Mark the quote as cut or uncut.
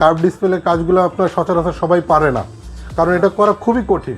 uncut